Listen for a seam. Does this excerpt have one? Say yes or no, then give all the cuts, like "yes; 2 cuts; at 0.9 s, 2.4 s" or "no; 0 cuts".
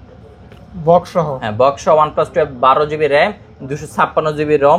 no; 0 cuts